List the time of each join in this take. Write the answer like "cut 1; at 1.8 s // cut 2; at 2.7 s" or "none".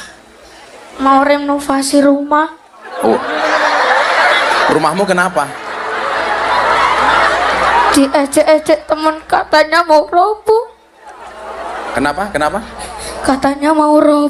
none